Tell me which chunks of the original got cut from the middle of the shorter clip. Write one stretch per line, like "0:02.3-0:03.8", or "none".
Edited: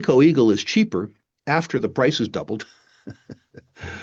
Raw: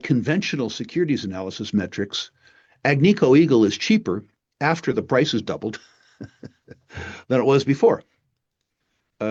none